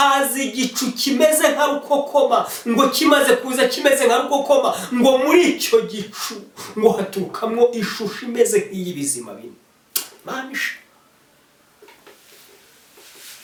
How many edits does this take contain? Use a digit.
0